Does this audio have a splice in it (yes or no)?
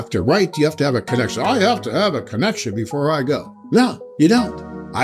yes